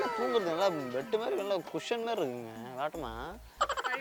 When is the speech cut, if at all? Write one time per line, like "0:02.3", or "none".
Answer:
none